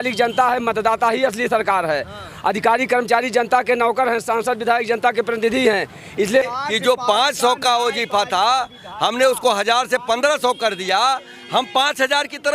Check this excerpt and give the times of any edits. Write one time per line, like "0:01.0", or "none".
0:06.4